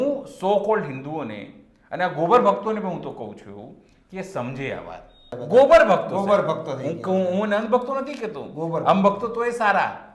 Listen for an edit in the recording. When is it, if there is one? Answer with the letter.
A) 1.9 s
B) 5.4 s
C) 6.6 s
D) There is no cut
B